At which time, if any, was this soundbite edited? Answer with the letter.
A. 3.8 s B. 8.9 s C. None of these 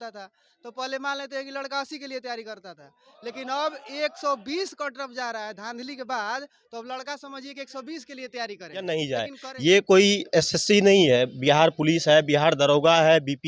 B